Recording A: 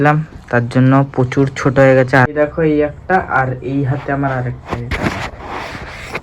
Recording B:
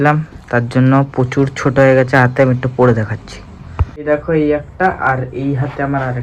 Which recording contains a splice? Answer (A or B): A